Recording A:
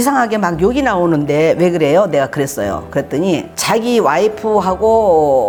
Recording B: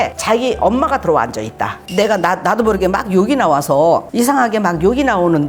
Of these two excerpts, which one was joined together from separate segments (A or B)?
B